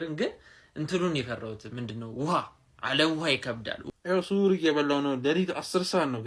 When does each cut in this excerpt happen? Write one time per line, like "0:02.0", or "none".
0:03.9